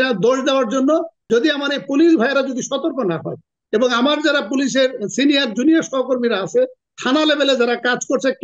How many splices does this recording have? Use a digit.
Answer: 1